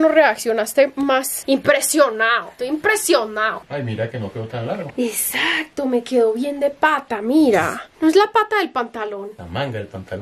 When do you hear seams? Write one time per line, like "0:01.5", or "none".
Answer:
0:03.6
0:07.8